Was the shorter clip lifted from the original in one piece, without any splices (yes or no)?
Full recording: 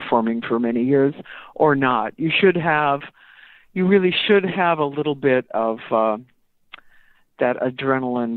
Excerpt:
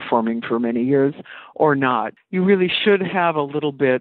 no